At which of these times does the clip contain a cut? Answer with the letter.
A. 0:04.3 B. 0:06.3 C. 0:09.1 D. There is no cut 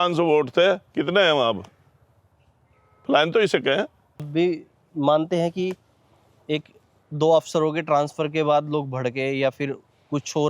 A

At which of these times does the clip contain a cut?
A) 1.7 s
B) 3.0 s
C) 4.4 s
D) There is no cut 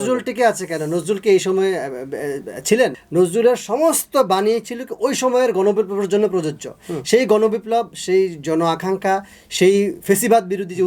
B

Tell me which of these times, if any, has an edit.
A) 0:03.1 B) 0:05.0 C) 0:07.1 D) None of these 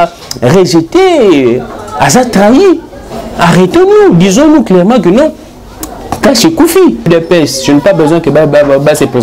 C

